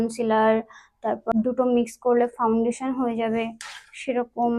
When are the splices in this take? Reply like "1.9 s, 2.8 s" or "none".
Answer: 1.3 s